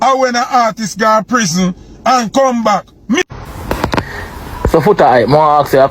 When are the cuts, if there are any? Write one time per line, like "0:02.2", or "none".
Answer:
0:03.3